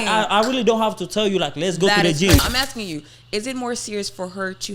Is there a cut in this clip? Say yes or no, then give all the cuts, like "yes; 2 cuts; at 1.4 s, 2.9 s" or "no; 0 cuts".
yes; 1 cut; at 2.4 s